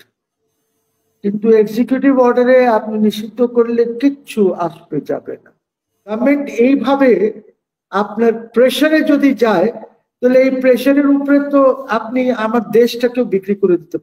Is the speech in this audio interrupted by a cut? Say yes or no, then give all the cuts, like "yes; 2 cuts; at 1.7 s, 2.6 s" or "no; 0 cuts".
yes; 1 cut; at 6.2 s